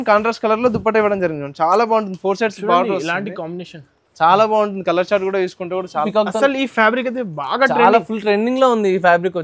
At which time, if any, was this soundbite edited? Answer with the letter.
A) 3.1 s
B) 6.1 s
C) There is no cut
B